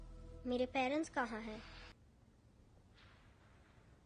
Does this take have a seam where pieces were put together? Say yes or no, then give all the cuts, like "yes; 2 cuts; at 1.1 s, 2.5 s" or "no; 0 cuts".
yes; 1 cut; at 2.0 s